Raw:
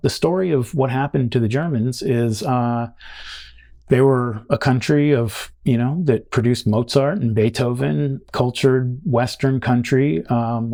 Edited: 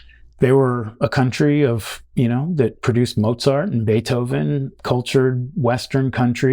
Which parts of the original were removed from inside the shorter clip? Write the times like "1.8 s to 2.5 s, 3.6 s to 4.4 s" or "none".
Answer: none